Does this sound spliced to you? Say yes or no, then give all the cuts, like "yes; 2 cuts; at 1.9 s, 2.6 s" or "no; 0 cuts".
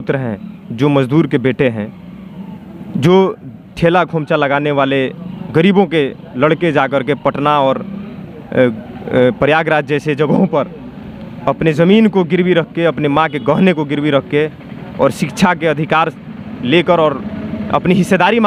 no; 0 cuts